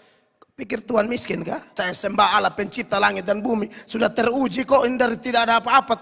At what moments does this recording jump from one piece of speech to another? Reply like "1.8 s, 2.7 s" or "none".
1.7 s